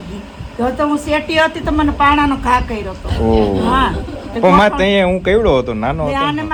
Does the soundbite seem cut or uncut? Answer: uncut